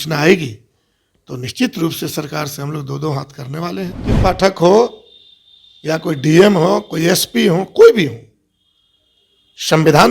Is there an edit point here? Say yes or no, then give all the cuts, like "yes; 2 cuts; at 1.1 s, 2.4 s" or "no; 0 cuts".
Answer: yes; 1 cut; at 4.2 s